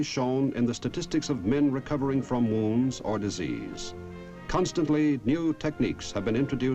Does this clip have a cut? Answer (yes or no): yes